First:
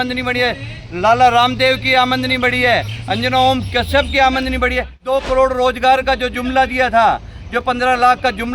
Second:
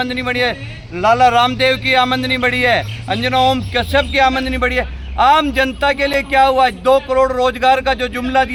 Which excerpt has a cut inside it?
first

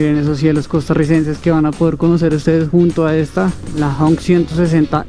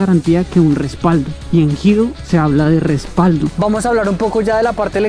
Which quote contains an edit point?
second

